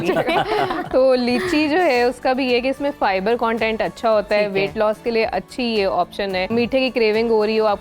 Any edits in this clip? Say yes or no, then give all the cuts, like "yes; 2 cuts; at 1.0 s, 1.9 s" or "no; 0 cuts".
yes; 1 cut; at 6.5 s